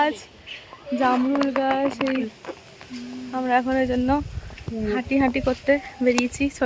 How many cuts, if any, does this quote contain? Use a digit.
1